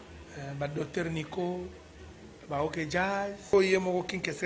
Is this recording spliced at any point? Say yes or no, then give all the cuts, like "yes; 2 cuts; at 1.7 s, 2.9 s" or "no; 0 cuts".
yes; 1 cut; at 3.5 s